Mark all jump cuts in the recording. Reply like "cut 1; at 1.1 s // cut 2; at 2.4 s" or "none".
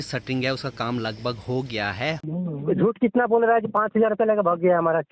cut 1; at 2.2 s